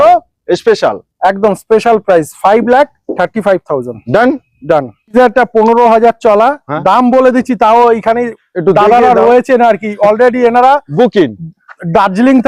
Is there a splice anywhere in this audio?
yes; 1 cut; at 5.1 s

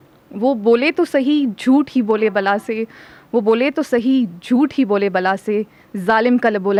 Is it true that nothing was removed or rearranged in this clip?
yes; 0 cuts

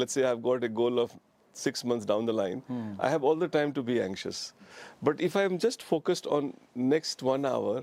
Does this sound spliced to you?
no; 0 cuts

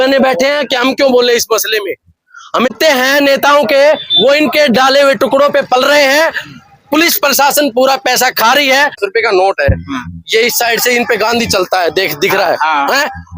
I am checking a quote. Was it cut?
yes; 2 cuts; at 2.7 s, 9.0 s

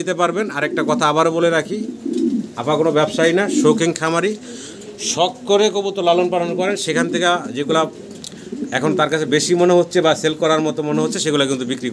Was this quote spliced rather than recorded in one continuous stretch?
no; 0 cuts

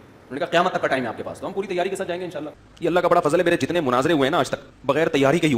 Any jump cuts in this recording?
yes; 2 cuts; at 2.5 s, 4.7 s

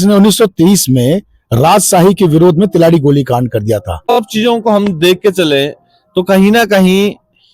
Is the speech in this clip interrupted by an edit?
yes; 1 cut; at 4.0 s

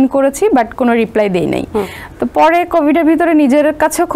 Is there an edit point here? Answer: no; 0 cuts

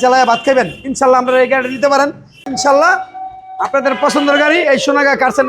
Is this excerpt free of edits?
no; 1 cut; at 2.5 s

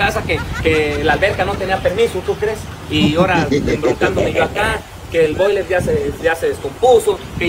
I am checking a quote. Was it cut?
no; 0 cuts

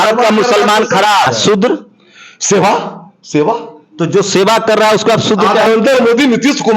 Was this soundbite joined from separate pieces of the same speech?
yes; 2 cuts; at 1.2 s, 5.7 s

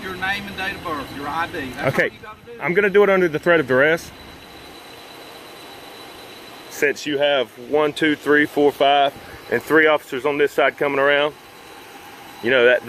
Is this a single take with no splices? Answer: yes; 0 cuts

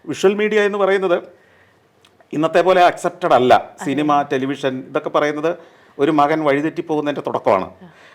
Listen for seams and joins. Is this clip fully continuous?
yes; 0 cuts

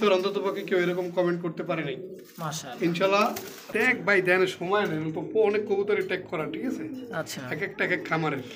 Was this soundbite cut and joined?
yes; 1 cut; at 3.6 s

